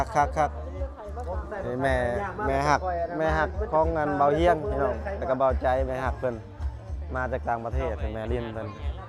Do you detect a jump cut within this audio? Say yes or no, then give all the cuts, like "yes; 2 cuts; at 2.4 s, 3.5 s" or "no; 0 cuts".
no; 0 cuts